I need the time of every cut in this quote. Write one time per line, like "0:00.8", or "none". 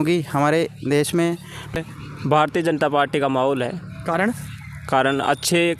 0:01.7